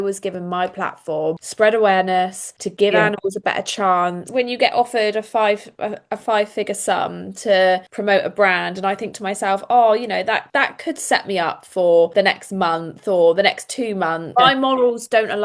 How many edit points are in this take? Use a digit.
2